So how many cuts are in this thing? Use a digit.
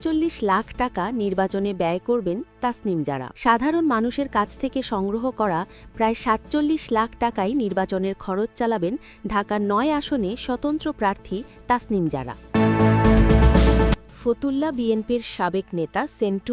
2